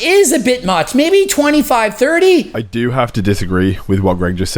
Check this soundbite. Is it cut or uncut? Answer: cut